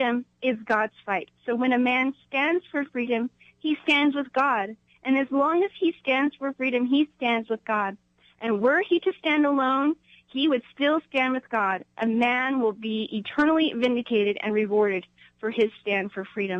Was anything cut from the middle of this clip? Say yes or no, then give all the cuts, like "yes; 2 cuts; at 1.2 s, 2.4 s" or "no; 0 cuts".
no; 0 cuts